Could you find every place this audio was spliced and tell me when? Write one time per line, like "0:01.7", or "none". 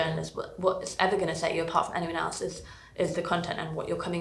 none